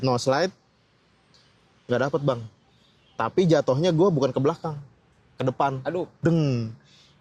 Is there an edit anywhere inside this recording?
no; 0 cuts

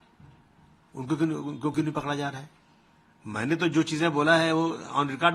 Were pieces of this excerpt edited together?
no; 0 cuts

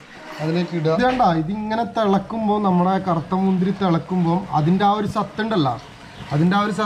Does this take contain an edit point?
yes; 1 cut; at 1.0 s

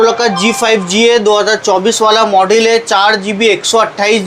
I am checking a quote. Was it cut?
no; 0 cuts

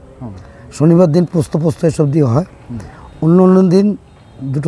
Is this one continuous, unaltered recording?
yes; 0 cuts

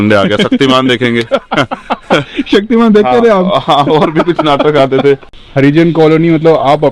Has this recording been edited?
yes; 1 cut; at 5.3 s

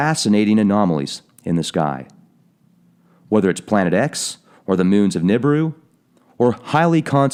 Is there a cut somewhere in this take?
no; 0 cuts

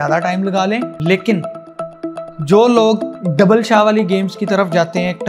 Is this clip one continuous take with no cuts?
no; 2 cuts; at 0.9 s, 3.2 s

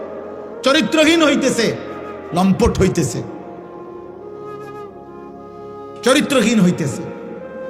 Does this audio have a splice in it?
yes; 2 cuts; at 3.4 s, 5.4 s

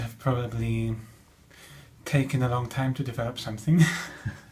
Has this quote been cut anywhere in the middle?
no; 0 cuts

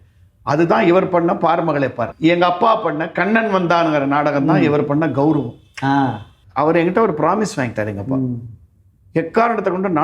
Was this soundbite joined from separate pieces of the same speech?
yes; 2 cuts; at 2.1 s, 6.4 s

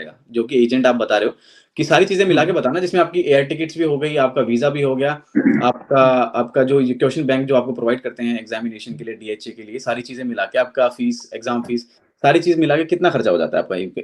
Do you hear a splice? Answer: no; 0 cuts

